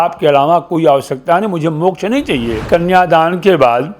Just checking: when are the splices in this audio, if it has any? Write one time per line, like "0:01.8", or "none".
0:02.6